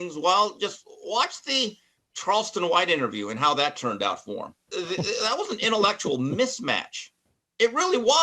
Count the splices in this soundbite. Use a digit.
1